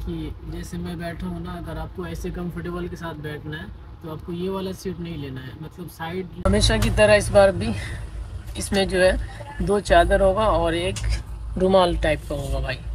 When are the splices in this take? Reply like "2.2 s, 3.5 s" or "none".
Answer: 6.4 s

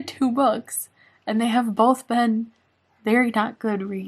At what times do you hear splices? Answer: none

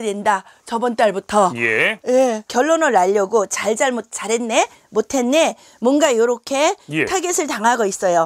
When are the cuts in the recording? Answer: none

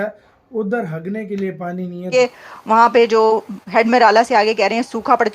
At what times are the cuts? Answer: 2.1 s

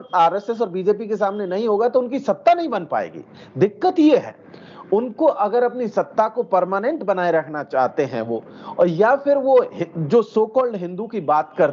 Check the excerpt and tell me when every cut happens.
none

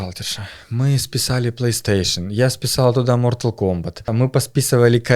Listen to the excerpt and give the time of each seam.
4.1 s

